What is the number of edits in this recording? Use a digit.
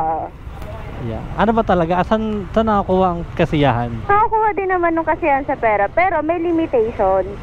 1